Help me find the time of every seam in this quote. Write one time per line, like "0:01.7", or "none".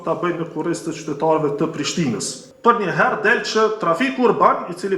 0:02.4